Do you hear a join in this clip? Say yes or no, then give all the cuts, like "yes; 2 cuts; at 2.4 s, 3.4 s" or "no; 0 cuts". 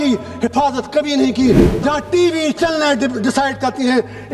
yes; 1 cut; at 1.7 s